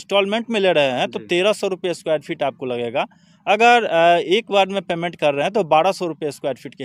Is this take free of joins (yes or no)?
yes